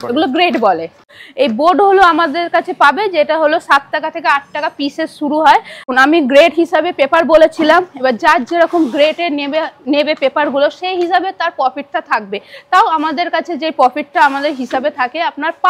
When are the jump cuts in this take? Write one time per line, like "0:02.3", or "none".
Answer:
0:01.0
0:05.9